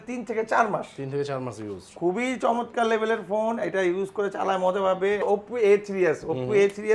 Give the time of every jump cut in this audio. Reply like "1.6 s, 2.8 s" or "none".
5.2 s